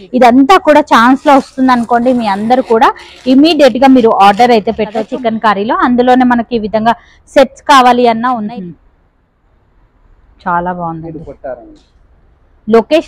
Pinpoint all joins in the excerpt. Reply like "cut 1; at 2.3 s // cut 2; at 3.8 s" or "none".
cut 1; at 5.0 s // cut 2; at 8.4 s